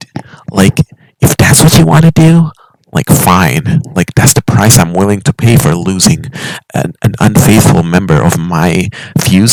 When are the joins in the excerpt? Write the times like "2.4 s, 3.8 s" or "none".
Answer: none